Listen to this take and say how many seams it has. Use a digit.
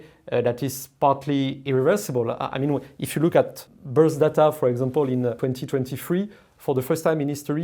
2